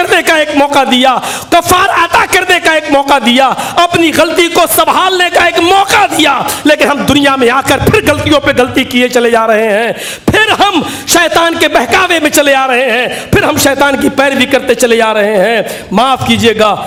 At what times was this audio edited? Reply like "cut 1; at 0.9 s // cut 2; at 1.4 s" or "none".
none